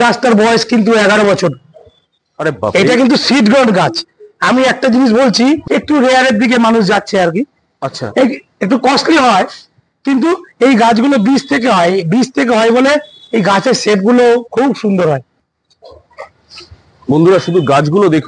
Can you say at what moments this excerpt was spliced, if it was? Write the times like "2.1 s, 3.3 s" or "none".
5.6 s, 15.4 s